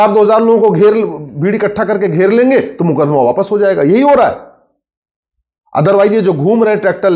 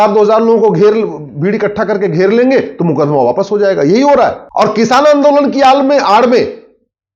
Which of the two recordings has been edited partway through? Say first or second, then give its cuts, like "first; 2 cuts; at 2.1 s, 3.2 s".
second; 1 cut; at 4.4 s